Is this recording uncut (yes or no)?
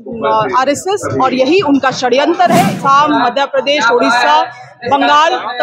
no